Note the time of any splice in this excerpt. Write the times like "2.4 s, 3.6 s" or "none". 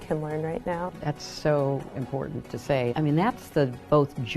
0.9 s, 2.9 s